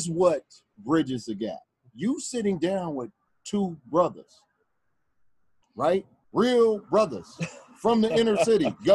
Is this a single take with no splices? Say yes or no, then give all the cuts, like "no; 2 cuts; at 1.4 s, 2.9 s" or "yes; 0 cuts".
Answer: yes; 0 cuts